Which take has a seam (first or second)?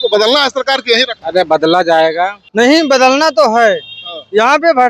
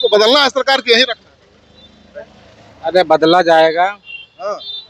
first